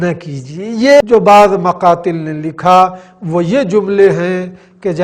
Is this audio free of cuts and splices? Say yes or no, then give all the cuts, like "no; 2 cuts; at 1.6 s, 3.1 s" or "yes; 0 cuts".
no; 1 cut; at 1.0 s